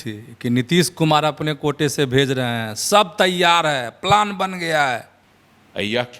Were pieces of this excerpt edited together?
yes; 1 cut; at 5.1 s

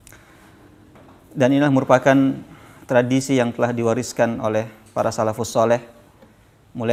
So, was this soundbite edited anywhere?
no; 0 cuts

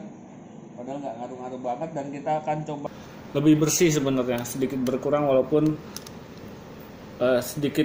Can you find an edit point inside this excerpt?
yes; 1 cut; at 2.8 s

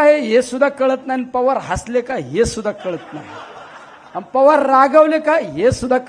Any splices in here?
no; 0 cuts

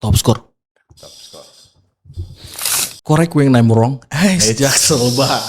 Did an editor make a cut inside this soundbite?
yes; 1 cut; at 2.8 s

